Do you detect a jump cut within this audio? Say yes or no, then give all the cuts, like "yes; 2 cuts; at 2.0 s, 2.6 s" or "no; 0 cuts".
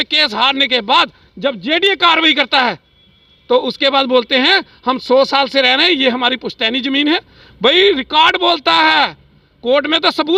no; 0 cuts